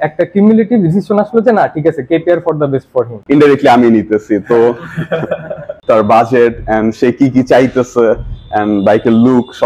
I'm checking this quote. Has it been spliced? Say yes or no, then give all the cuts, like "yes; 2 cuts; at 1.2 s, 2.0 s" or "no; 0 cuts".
yes; 2 cuts; at 3.2 s, 5.8 s